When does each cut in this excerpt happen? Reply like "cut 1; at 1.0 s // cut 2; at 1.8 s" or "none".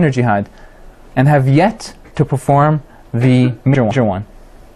cut 1; at 2.9 s